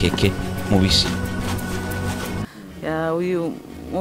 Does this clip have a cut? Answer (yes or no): yes